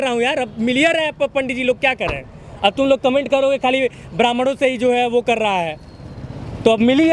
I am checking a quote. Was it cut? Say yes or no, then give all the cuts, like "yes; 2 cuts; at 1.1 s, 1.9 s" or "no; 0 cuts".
no; 0 cuts